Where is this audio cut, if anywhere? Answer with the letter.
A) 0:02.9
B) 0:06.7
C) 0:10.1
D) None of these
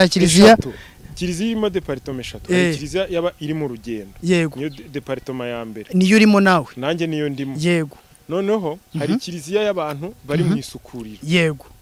D